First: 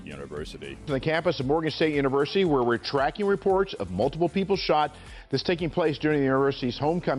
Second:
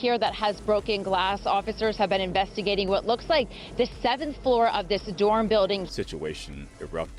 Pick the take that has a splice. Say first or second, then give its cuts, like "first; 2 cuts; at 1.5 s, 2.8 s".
second; 1 cut; at 6.0 s